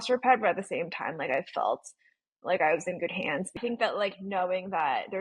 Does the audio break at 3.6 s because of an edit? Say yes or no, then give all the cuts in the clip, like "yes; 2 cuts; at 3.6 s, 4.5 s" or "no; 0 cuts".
yes; 1 cut; at 3.6 s